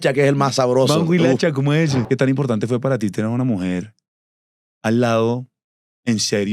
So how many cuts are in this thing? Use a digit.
1